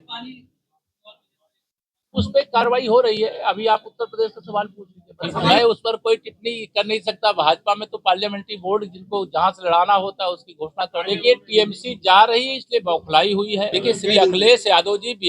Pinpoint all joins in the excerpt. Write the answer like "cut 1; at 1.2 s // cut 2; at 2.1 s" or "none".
cut 1; at 5.5 s // cut 2; at 11.0 s // cut 3; at 13.7 s